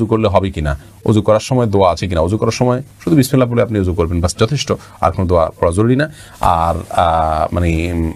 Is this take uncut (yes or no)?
yes